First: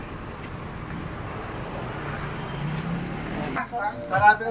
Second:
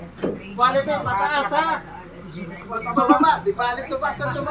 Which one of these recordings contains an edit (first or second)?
first